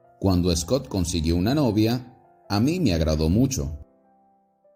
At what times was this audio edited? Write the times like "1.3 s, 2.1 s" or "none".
none